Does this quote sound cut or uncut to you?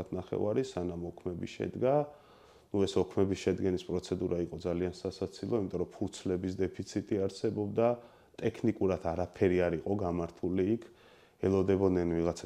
uncut